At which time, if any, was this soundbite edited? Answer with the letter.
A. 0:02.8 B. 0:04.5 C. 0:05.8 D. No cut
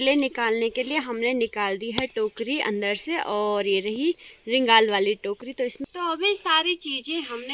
C